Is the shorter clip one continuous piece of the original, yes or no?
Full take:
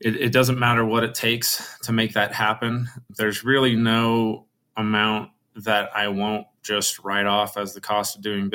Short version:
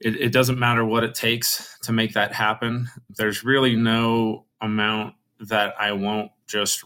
no